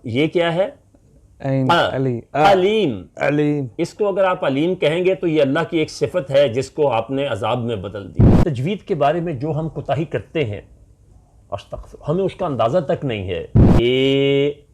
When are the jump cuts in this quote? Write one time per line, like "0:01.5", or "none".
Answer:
0:08.2
0:13.6